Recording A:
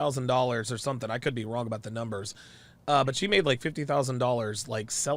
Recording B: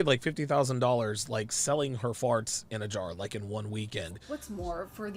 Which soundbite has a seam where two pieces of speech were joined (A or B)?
B